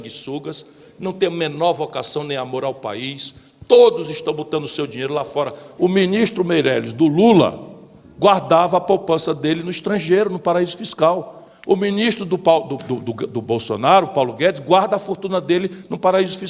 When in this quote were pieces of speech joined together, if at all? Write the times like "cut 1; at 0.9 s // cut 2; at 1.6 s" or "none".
cut 1; at 5.6 s